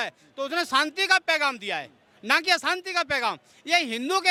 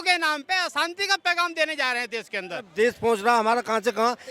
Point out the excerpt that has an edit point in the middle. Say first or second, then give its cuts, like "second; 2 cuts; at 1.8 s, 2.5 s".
second; 1 cut; at 2.7 s